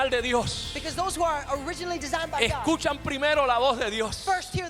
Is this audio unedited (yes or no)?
yes